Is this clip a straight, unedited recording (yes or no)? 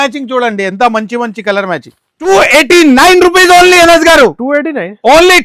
no